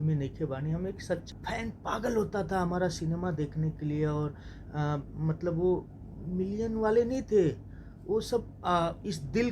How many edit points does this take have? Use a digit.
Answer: 1